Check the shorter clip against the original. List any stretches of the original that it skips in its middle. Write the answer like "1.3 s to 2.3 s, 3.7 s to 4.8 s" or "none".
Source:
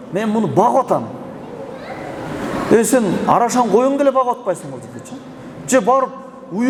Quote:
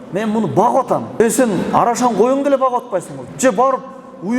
1.2 s to 2.7 s, 4.7 s to 5.5 s